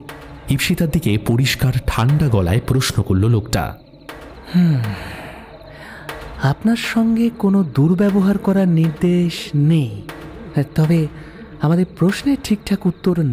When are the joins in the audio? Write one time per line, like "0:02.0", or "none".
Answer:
none